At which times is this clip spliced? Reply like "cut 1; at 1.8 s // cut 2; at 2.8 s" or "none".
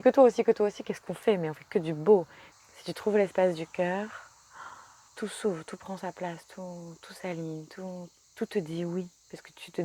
cut 1; at 2.4 s // cut 2; at 5.1 s // cut 3; at 8.2 s